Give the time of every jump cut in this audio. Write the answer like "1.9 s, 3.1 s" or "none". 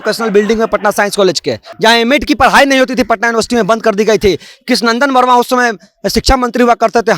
1.7 s